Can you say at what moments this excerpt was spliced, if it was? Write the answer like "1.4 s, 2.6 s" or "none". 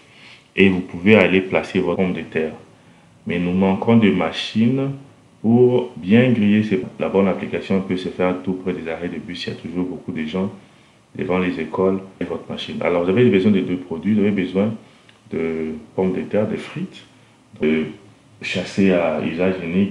2.0 s, 6.8 s, 12.2 s, 17.6 s